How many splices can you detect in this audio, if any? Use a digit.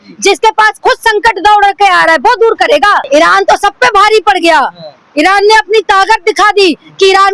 1